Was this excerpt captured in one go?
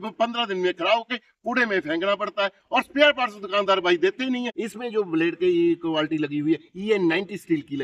no; 1 cut; at 4.6 s

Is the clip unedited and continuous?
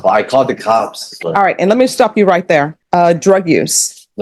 no; 2 cuts; at 1.1 s, 2.8 s

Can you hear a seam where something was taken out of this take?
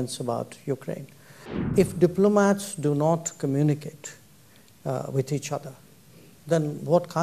yes; 1 cut; at 1.7 s

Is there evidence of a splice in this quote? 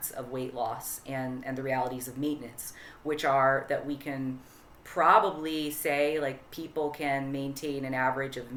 no; 0 cuts

